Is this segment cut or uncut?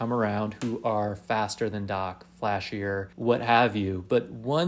cut